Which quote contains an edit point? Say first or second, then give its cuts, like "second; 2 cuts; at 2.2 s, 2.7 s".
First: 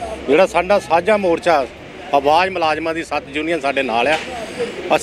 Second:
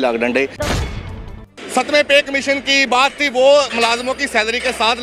second; 1 cut; at 1.0 s